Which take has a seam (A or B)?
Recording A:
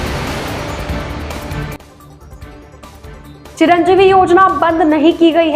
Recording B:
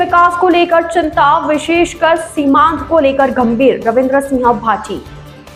A